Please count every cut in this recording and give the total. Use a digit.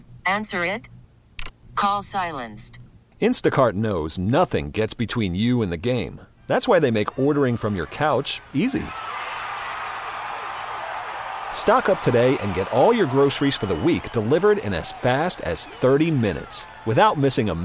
0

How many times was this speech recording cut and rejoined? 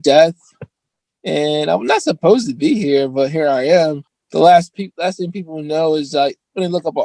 1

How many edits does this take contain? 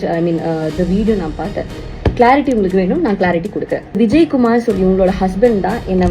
1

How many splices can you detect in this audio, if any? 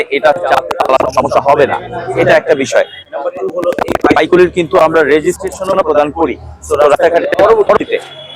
0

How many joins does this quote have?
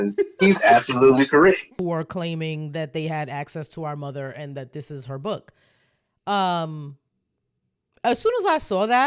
1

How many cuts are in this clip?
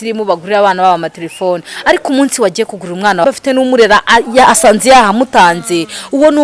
1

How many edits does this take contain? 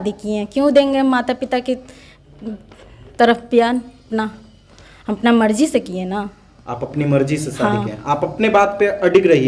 0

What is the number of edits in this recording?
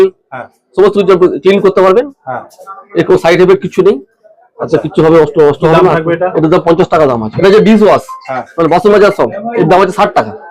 2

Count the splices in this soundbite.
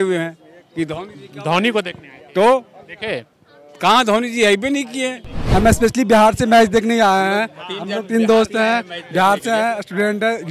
1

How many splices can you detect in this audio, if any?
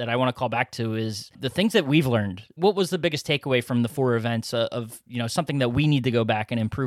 2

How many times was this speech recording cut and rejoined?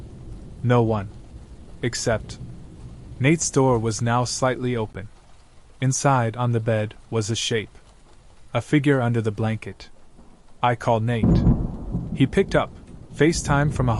2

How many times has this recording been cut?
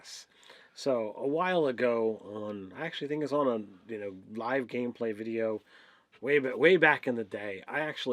1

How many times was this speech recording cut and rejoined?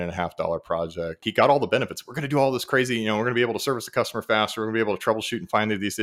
1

